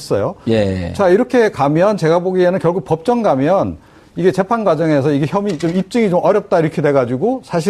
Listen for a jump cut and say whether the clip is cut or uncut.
uncut